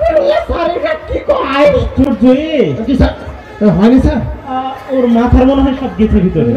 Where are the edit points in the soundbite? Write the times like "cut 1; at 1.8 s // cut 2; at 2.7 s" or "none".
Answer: none